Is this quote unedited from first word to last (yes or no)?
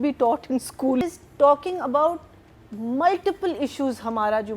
no